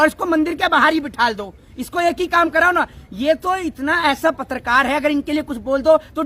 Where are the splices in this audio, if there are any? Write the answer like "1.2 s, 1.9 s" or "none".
none